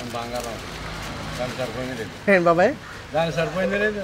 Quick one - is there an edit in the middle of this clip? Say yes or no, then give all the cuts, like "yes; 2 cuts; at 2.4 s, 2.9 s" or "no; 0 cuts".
no; 0 cuts